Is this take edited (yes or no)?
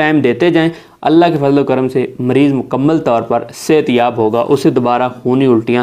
no